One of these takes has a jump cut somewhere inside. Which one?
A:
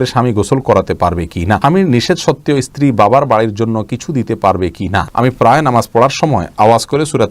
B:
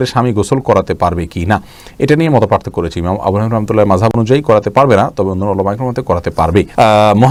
A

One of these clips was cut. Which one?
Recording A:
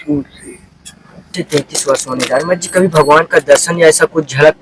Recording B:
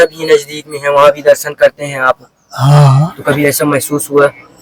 A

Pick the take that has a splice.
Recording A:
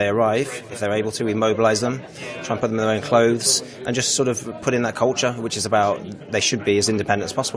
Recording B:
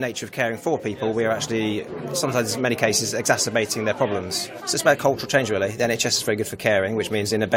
B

